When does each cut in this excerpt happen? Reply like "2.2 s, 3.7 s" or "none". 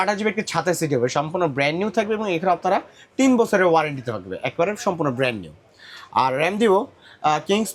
none